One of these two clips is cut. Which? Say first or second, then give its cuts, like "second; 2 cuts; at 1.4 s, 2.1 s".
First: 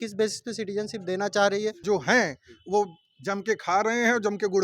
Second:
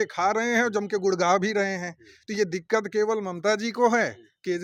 first; 1 cut; at 1.8 s